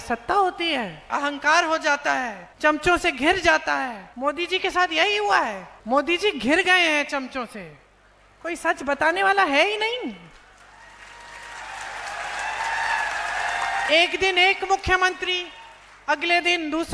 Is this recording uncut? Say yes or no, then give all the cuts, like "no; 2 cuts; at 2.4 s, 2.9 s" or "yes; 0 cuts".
no; 4 cuts; at 1.1 s, 2.4 s, 4.0 s, 5.7 s